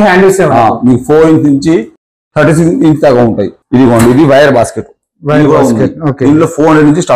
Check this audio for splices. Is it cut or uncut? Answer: cut